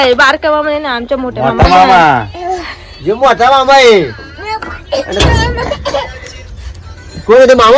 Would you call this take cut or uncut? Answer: uncut